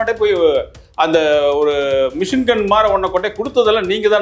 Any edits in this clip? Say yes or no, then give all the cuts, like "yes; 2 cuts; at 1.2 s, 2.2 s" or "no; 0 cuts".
no; 0 cuts